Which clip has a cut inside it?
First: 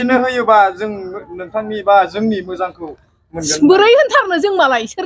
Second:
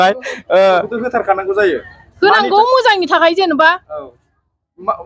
second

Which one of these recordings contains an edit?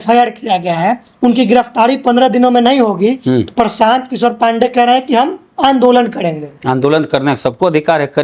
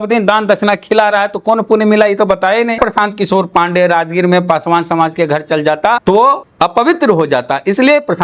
second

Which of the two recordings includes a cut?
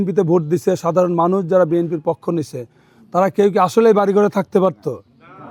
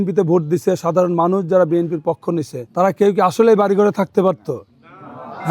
second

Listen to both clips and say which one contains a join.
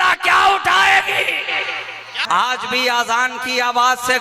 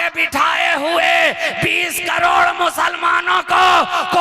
first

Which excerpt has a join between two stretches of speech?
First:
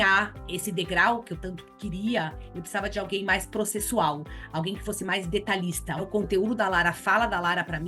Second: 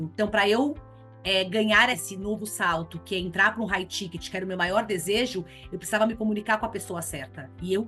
first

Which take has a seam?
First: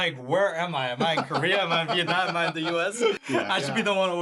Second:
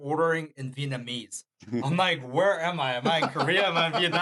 first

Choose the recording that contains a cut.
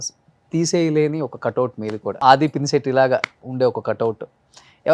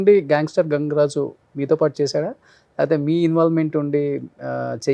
first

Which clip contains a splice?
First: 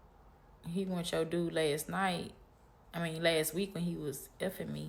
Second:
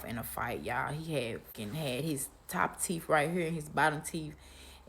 second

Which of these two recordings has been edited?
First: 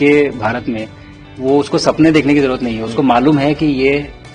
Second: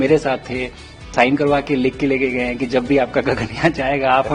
second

